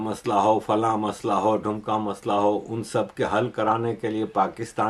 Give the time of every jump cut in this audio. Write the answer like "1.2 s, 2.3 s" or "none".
none